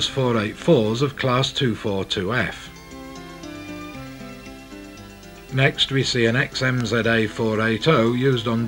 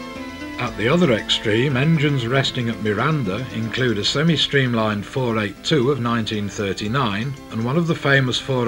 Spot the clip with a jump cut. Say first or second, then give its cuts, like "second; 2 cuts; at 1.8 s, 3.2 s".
second; 1 cut; at 3.7 s